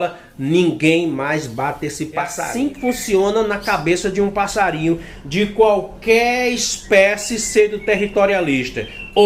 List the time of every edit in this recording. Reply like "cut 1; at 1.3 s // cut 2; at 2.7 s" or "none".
cut 1; at 2.4 s